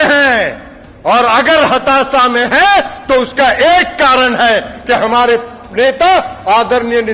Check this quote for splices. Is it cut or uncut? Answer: uncut